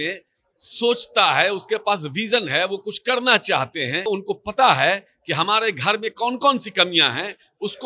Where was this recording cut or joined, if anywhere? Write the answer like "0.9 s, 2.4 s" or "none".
4.1 s

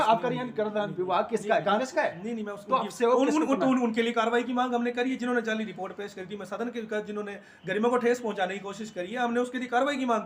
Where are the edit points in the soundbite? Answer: none

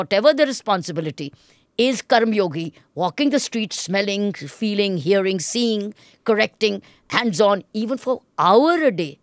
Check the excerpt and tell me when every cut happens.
none

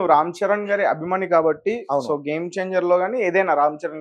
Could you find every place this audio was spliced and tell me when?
none

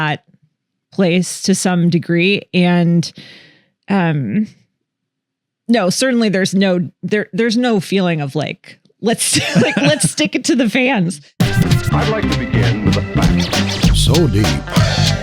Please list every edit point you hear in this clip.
11.2 s

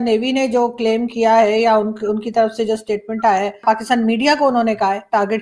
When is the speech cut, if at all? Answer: 3.6 s

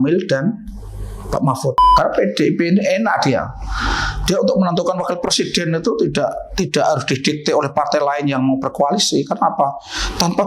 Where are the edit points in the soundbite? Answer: 1.8 s

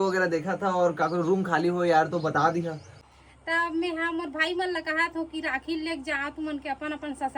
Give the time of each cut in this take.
3.0 s

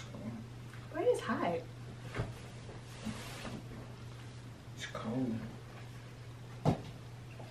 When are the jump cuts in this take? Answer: none

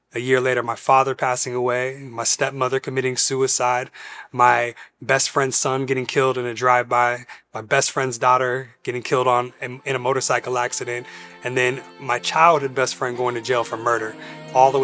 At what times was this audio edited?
none

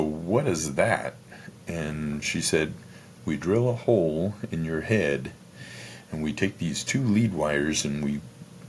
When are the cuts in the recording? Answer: none

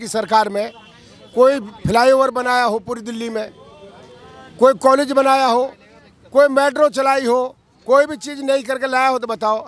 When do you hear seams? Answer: none

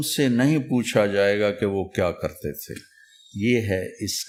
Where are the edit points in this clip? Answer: none

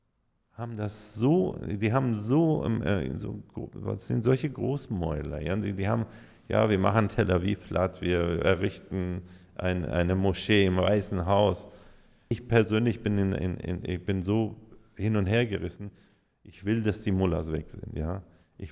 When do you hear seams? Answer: 12.4 s

